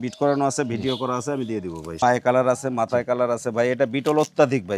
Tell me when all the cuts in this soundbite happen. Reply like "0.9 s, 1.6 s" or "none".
2.0 s